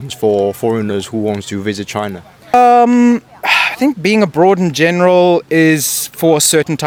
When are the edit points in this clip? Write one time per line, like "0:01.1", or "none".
none